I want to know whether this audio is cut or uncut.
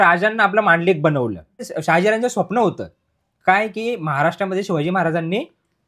cut